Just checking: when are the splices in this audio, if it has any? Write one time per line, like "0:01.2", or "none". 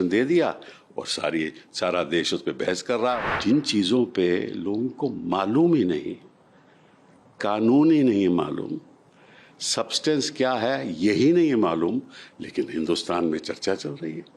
0:03.2